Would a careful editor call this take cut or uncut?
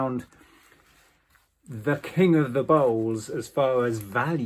uncut